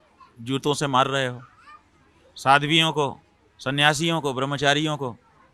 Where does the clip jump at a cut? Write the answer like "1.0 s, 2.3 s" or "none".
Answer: none

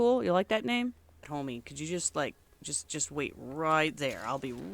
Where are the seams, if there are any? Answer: 1.3 s

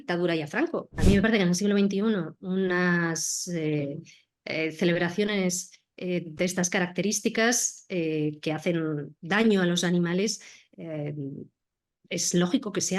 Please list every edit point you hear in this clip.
1.0 s

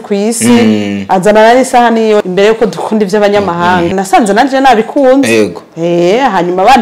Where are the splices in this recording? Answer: 2.3 s, 3.9 s

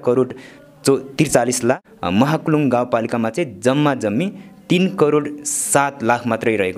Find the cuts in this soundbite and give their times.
1.9 s

